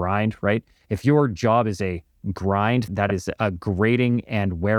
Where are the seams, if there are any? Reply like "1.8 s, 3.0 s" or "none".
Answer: 2.9 s